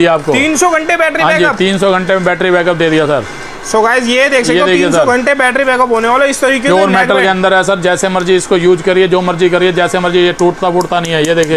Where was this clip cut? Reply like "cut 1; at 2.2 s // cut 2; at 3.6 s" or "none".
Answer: none